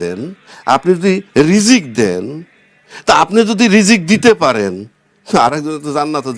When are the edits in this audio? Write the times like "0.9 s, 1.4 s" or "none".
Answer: none

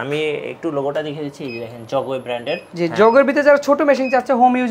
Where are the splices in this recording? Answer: 2.7 s

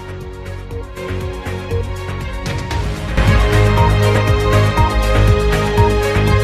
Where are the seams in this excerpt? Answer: 1.2 s

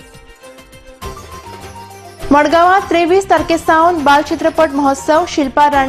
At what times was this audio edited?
2.1 s

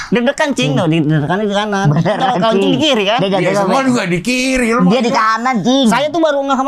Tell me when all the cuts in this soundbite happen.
none

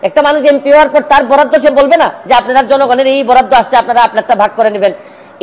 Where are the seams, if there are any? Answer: none

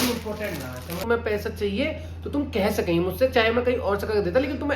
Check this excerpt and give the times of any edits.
1.0 s

